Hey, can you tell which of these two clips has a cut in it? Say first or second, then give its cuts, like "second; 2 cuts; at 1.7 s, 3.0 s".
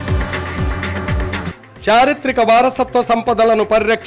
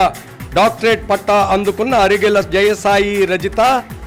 first; 1 cut; at 1.5 s